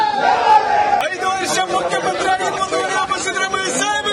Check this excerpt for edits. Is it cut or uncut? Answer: cut